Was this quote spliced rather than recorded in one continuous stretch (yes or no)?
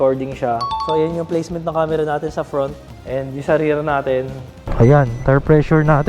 yes